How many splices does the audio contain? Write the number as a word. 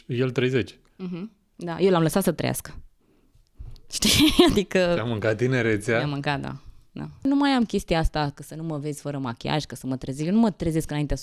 one